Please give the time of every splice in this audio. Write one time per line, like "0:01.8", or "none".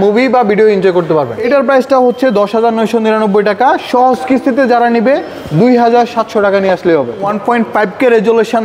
0:01.4
0:07.3